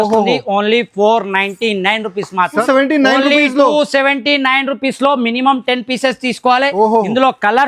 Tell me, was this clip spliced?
yes; 1 cut; at 2.6 s

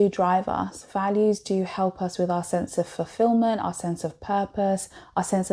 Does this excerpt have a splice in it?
no; 0 cuts

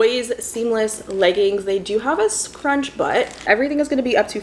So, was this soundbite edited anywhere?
yes; 1 cut; at 3.4 s

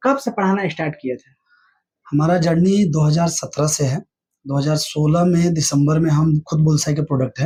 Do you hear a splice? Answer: no; 0 cuts

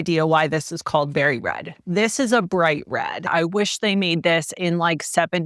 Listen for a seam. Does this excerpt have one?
yes; 1 cut; at 3.2 s

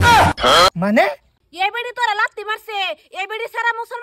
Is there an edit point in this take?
yes; 1 cut; at 1.0 s

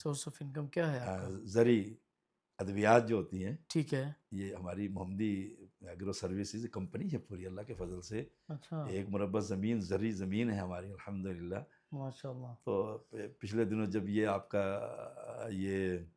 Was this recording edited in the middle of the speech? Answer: no; 0 cuts

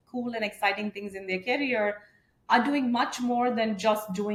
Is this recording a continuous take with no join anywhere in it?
yes; 0 cuts

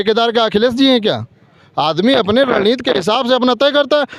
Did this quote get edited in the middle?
no; 0 cuts

